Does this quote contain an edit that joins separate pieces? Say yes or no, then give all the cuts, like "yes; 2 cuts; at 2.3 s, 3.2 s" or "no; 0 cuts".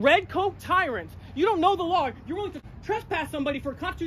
yes; 1 cut; at 2.6 s